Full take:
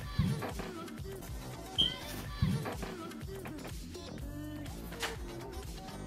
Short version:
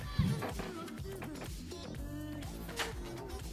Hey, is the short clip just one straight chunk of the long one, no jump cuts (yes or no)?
no